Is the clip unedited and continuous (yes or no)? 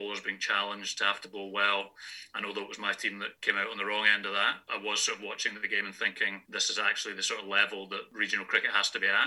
no